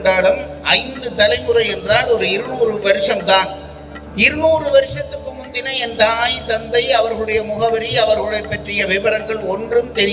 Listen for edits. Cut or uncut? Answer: uncut